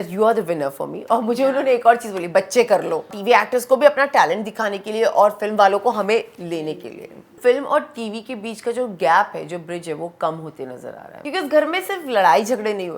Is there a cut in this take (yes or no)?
yes